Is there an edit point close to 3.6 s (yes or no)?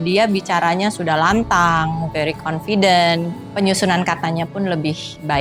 no